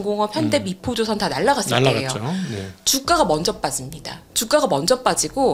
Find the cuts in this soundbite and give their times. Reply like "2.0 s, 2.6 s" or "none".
none